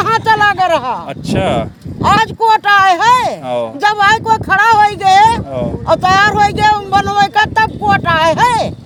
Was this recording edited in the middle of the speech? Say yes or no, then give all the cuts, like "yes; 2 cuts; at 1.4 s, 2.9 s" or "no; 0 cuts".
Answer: no; 0 cuts